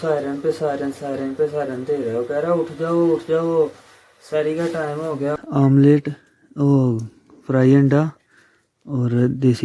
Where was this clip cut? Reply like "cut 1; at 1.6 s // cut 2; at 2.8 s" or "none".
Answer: cut 1; at 5.4 s